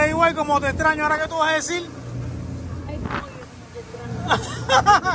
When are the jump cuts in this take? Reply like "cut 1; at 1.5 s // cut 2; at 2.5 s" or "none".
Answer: none